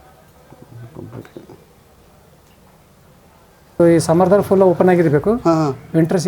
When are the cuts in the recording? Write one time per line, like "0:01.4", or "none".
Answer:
0:03.8